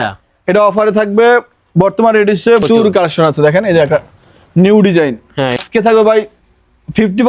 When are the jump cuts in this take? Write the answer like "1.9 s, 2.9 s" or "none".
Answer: 2.6 s, 5.6 s